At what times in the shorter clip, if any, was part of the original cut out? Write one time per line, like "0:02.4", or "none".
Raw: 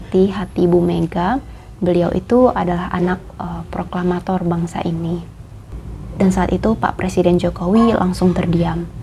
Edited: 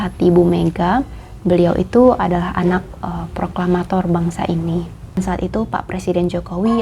0:05.2